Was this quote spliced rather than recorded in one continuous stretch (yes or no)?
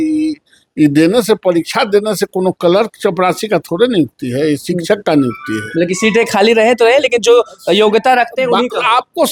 no